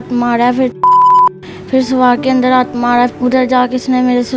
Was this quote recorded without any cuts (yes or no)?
no